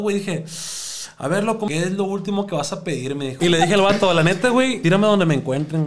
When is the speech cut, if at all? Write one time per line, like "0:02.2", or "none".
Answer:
0:01.7
0:03.3
0:04.8

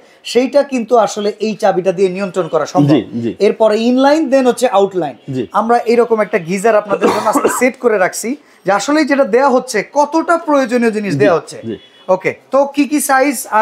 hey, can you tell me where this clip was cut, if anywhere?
none

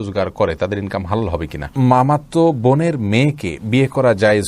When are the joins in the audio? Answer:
0:01.7

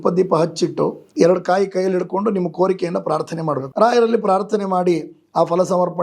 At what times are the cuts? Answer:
0:01.0
0:03.7

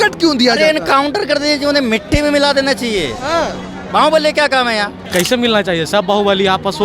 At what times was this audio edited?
0:05.0

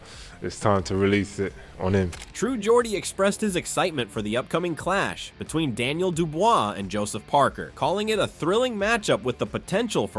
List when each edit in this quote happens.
none

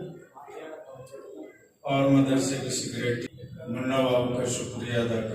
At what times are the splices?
0:03.3

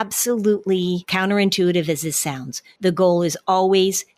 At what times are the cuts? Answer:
0:01.1

